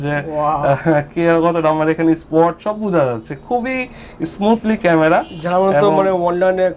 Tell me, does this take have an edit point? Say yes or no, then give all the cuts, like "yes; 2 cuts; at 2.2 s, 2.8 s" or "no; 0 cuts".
no; 0 cuts